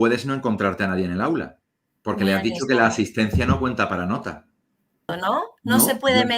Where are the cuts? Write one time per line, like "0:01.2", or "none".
0:05.2